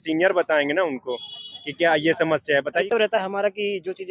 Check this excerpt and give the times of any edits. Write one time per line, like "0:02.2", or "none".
0:02.8